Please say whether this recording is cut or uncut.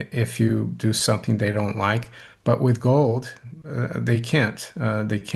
uncut